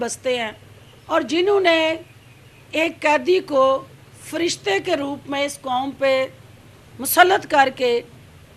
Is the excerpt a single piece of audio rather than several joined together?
yes; 0 cuts

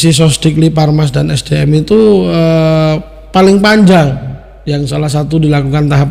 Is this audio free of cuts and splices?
yes; 0 cuts

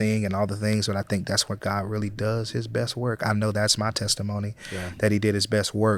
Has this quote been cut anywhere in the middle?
no; 0 cuts

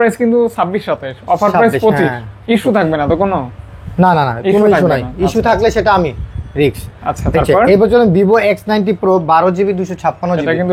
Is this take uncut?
yes; 0 cuts

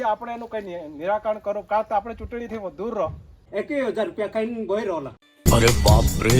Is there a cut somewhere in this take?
yes; 1 cut; at 3.4 s

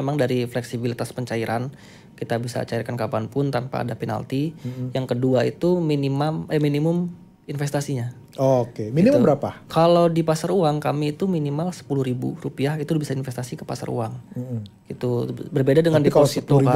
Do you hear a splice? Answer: no; 0 cuts

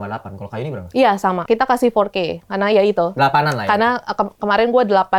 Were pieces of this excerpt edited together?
yes; 1 cut; at 1.4 s

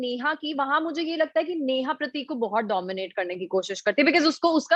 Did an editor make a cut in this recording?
no; 0 cuts

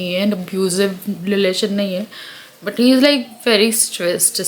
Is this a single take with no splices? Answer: yes; 0 cuts

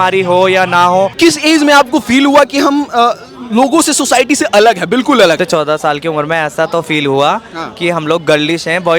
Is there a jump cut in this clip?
yes; 2 cuts; at 1.1 s, 5.4 s

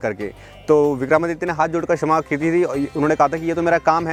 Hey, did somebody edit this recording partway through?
no; 0 cuts

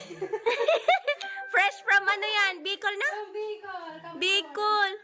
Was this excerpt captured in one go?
yes; 0 cuts

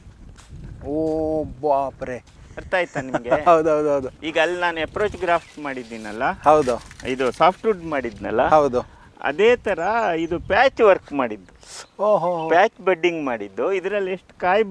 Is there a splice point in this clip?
no; 0 cuts

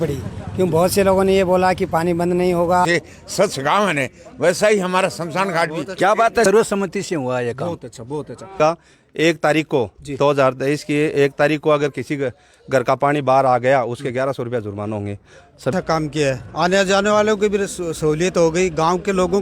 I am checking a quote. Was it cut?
yes; 4 cuts; at 2.8 s, 6.4 s, 8.6 s, 15.7 s

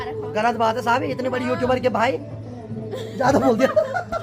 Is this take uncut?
yes; 0 cuts

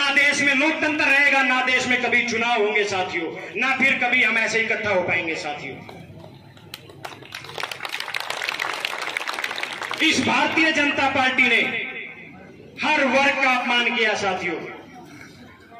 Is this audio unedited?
yes; 0 cuts

